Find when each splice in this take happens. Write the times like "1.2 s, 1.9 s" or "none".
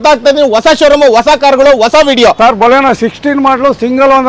2.4 s